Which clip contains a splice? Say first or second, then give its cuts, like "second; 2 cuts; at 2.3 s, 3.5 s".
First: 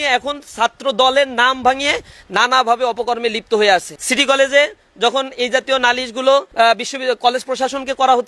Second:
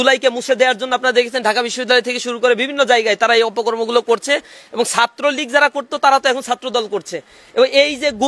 first; 2 cuts; at 4.0 s, 6.5 s